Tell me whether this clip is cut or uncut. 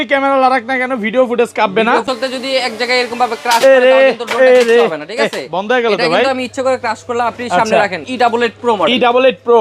cut